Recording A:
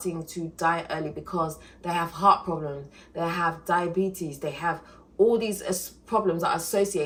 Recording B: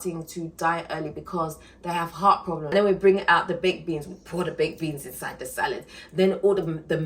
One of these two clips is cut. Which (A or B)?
B